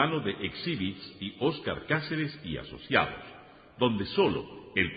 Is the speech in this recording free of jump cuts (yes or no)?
yes